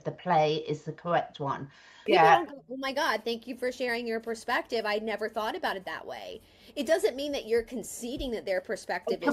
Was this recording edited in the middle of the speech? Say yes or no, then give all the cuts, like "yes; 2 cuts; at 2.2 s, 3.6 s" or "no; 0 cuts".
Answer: yes; 1 cut; at 2.0 s